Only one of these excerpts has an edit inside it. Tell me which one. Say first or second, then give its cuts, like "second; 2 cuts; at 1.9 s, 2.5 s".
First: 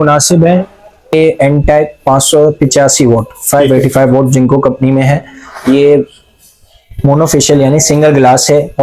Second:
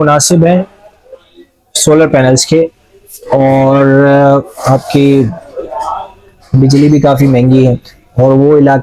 first; 1 cut; at 1.1 s